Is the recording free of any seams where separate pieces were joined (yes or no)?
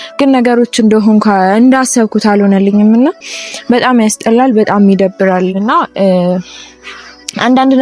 yes